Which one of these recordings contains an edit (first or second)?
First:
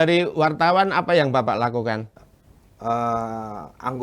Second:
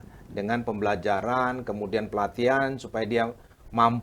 first